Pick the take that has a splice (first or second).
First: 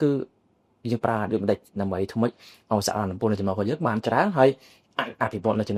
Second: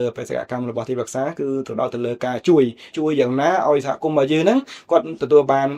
second